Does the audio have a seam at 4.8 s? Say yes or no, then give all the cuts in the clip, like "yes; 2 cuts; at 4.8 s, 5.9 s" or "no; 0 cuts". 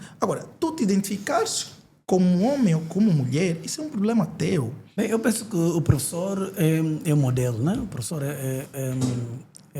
yes; 1 cut; at 4.8 s